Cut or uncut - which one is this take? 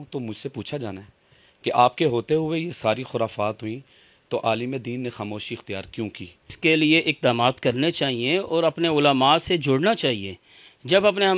cut